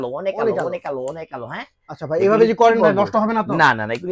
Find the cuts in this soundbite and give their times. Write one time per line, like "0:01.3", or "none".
none